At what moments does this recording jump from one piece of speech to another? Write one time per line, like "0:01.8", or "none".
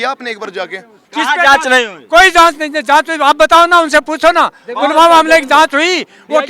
0:01.0